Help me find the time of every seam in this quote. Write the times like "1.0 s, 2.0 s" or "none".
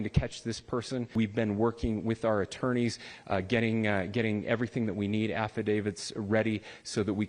1.1 s

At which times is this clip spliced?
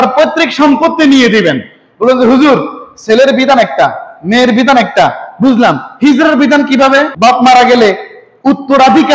7.1 s

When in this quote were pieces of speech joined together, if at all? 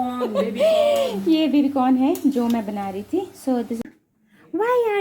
3.8 s

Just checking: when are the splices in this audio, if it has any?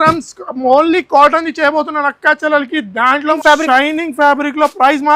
3.4 s

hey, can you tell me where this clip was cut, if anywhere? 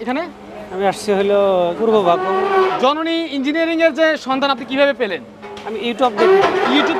1.8 s, 2.7 s

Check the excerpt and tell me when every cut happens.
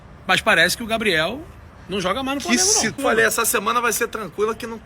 3.0 s

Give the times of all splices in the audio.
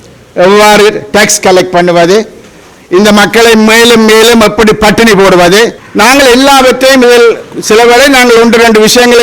5.8 s

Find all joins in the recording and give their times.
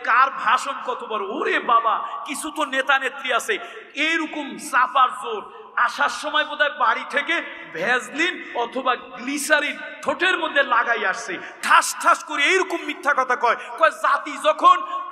none

